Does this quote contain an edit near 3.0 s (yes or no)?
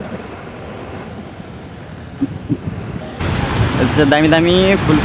yes